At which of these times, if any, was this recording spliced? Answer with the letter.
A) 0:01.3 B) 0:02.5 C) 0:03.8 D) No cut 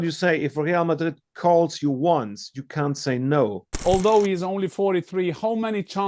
C